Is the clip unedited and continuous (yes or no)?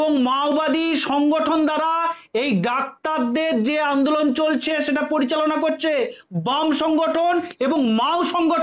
yes